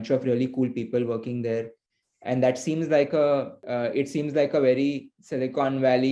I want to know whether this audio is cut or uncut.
cut